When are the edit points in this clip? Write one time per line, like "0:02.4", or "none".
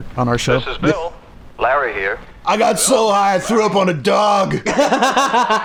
none